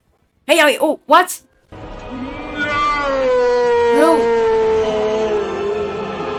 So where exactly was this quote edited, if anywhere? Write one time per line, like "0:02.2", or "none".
none